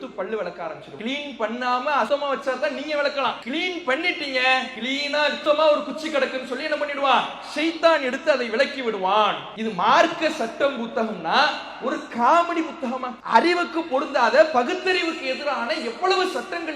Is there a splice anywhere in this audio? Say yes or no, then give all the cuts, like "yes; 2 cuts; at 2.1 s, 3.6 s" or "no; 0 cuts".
yes; 6 cuts; at 0.9 s, 2.1 s, 3.4 s, 5.1 s, 9.5 s, 13.1 s